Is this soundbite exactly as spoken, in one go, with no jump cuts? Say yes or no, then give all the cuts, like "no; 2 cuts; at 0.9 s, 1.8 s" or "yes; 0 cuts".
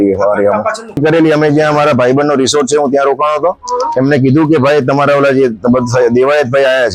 no; 1 cut; at 1.0 s